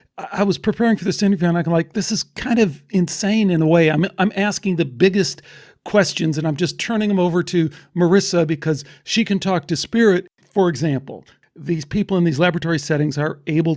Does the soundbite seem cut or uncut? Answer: cut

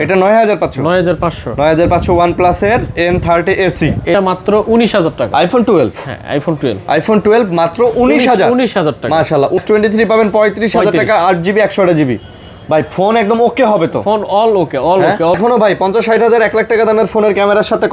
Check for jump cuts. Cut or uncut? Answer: cut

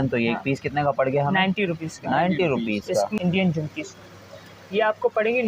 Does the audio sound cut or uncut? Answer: cut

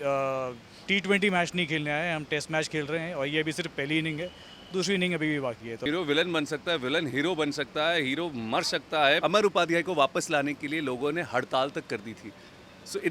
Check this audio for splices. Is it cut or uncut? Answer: cut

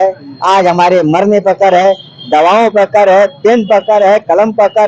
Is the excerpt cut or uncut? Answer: uncut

